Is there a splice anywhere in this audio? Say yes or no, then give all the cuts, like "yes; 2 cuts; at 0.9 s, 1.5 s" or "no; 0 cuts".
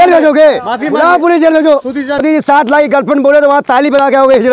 yes; 1 cut; at 1.9 s